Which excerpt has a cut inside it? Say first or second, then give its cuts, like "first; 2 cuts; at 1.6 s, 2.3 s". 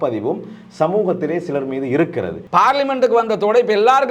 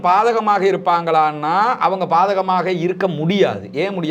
first; 1 cut; at 2.3 s